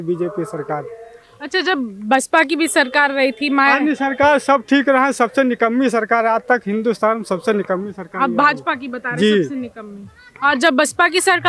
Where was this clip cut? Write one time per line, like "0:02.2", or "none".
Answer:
none

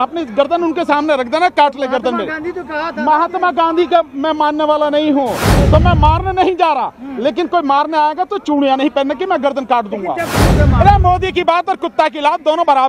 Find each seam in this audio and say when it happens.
0:05.5
0:10.5

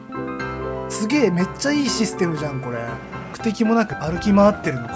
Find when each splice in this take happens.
0:03.3
0:04.0

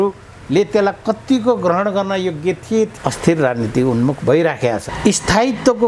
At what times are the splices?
0:02.9
0:04.9

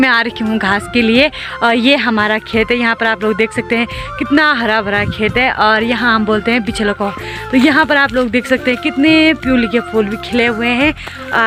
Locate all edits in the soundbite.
none

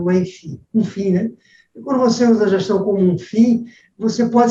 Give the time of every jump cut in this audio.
none

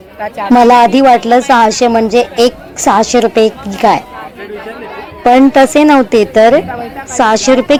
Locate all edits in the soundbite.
none

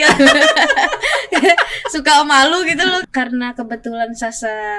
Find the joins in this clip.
0:03.0

